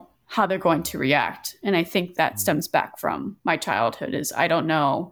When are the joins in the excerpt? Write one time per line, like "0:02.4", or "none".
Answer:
0:03.3